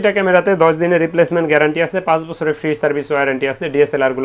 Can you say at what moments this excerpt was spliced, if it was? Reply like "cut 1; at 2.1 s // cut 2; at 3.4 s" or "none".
none